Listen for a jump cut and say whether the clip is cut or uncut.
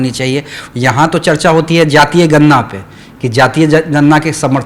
uncut